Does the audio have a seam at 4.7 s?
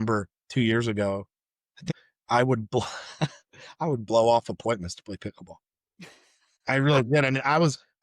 no; 1 cut; at 1.8 s

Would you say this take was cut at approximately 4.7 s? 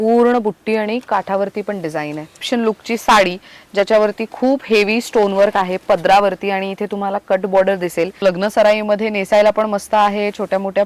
no; 2 cuts; at 2.4 s, 8.2 s

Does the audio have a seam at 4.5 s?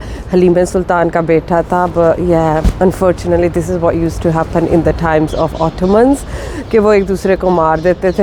no; 0 cuts

